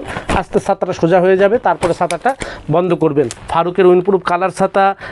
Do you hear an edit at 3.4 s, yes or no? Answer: yes